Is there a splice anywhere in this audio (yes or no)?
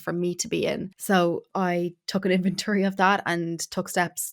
yes